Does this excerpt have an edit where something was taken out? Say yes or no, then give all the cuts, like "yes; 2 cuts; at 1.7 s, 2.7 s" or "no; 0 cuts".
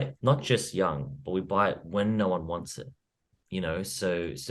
no; 0 cuts